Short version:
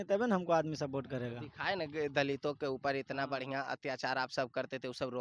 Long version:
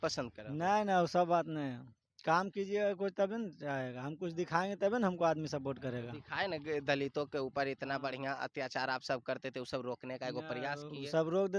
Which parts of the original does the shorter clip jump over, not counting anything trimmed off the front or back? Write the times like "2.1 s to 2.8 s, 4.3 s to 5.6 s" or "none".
none